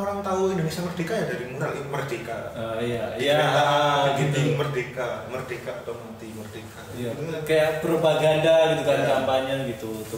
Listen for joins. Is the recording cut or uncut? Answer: uncut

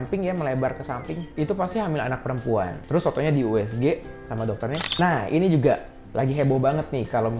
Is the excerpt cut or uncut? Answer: cut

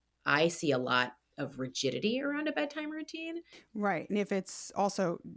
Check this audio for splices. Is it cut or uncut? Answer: cut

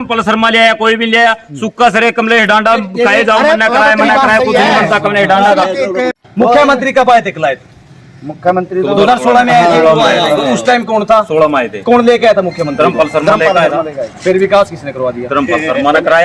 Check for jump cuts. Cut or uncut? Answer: cut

